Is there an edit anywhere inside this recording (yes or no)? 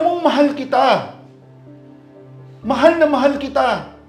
no